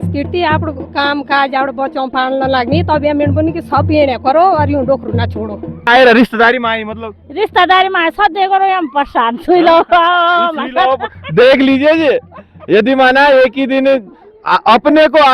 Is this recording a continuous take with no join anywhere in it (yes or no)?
no